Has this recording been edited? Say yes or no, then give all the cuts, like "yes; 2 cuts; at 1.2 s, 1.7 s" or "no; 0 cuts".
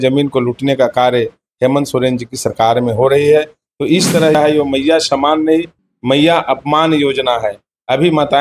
yes; 1 cut; at 4.3 s